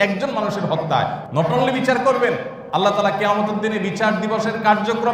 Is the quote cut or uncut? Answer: cut